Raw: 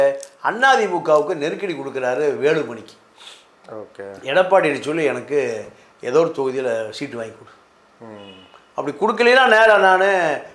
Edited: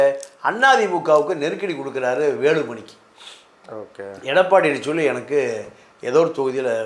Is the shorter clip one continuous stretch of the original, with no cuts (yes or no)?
yes